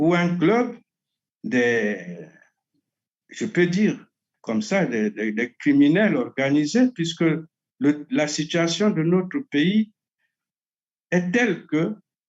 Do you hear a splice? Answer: no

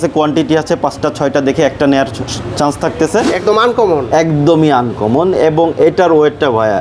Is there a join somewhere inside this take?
yes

